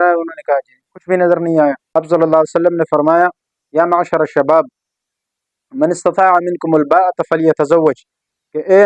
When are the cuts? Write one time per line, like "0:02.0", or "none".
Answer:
0:01.8